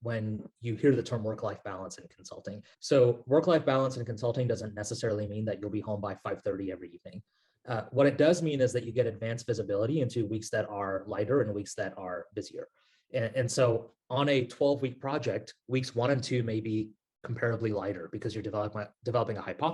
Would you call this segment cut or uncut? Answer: uncut